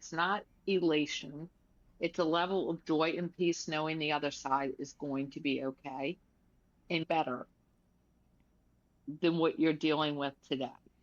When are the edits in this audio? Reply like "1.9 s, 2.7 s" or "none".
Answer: 7.1 s

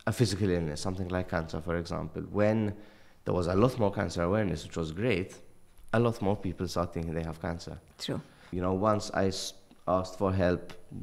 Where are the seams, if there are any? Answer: 8.5 s

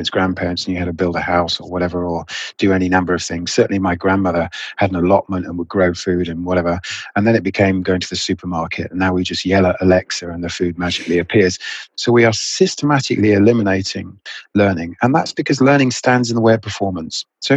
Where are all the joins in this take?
11.7 s

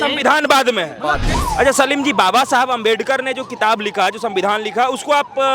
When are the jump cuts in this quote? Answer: 1.3 s

